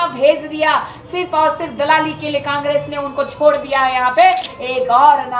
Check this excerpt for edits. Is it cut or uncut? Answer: cut